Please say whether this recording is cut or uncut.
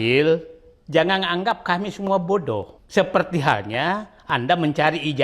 cut